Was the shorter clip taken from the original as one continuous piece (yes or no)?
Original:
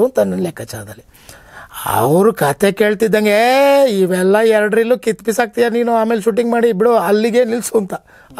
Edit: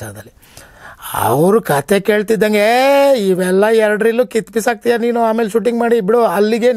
yes